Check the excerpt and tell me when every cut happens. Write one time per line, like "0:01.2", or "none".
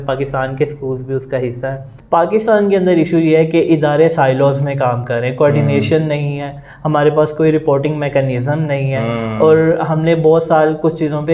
0:01.9